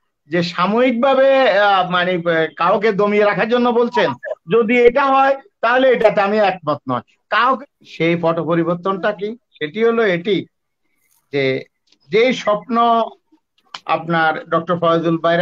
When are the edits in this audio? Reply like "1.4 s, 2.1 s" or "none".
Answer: none